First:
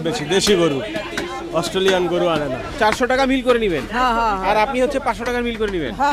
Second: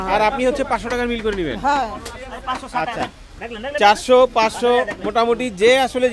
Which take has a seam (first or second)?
first